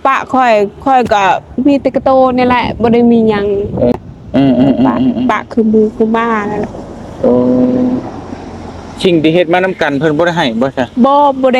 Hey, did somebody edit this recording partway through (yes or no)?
yes